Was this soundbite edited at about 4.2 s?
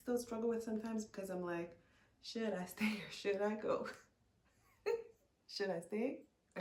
no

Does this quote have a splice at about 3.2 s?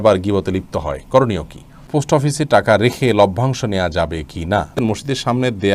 no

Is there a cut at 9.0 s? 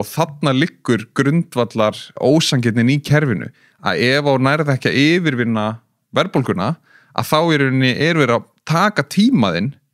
no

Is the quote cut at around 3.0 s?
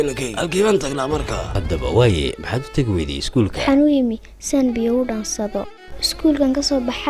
no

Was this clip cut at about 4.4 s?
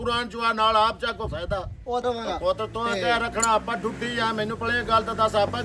no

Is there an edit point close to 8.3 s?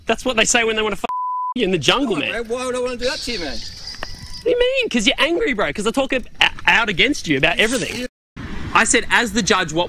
yes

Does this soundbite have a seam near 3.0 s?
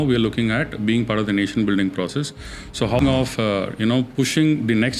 yes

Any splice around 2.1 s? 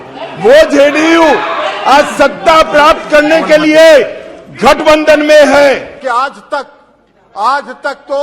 no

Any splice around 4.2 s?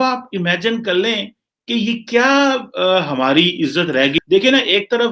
yes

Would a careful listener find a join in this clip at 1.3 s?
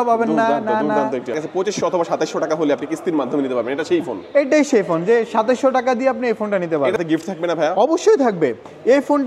yes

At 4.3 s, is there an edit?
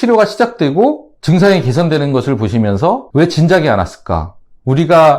no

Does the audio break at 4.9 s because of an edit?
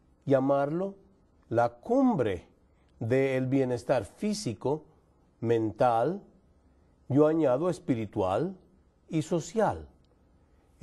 yes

